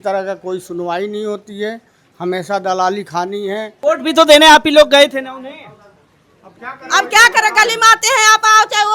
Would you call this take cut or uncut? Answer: cut